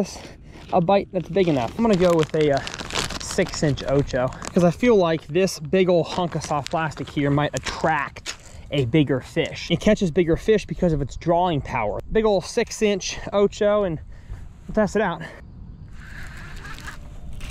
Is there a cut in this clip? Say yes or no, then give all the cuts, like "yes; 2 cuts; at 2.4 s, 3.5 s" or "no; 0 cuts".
yes; 4 cuts; at 1.7 s, 9.6 s, 12.0 s, 15.5 s